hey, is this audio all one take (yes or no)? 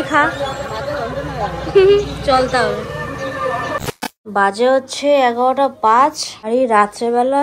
yes